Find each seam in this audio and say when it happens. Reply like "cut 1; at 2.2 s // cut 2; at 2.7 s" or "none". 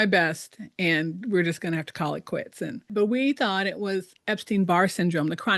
cut 1; at 2.9 s